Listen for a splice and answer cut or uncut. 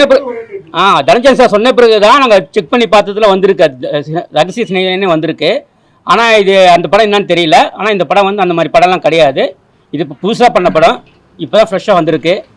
uncut